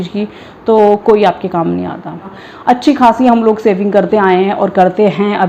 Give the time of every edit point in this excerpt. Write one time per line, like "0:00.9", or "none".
0:02.3